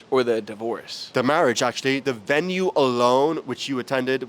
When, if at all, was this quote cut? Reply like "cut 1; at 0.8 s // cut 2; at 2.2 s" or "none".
cut 1; at 1.1 s // cut 2; at 2.0 s

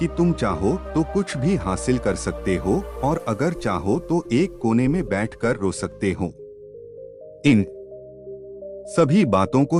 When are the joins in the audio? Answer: none

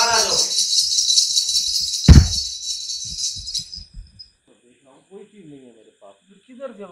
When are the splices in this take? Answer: cut 1; at 4.5 s

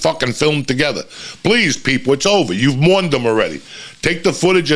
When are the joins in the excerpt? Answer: none

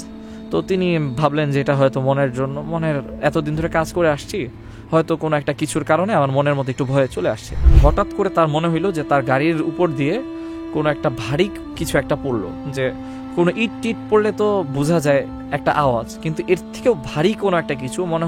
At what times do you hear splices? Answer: cut 1; at 7.6 s

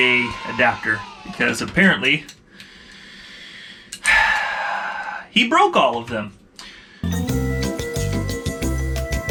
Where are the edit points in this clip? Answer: none

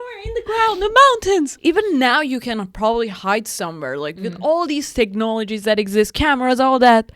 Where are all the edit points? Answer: cut 1; at 1.5 s

